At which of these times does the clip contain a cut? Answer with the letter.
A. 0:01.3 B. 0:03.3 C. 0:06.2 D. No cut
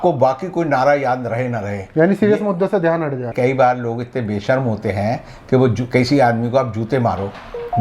B